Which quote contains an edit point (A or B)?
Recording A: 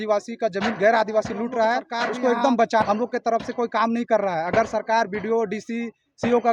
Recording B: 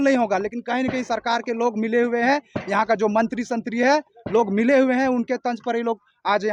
A